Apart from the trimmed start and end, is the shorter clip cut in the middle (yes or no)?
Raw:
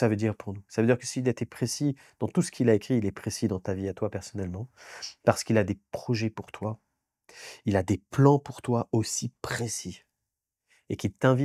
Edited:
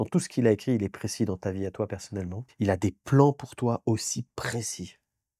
yes